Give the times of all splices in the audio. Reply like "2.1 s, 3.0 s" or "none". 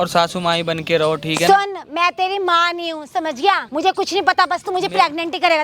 3.6 s